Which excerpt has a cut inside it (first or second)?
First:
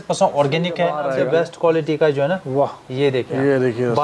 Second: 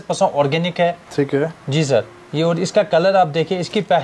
first